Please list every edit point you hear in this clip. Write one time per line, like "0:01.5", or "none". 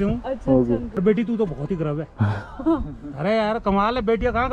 0:01.0

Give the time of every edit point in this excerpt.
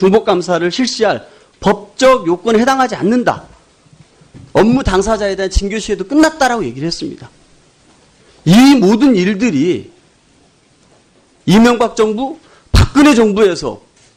none

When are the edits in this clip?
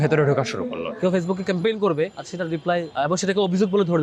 0:00.9
0:02.6

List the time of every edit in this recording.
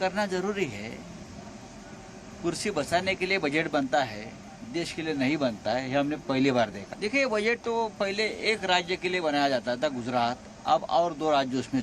0:06.8

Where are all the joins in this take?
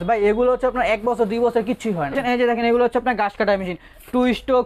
0:02.1

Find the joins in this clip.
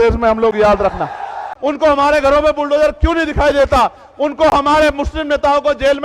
0:01.5

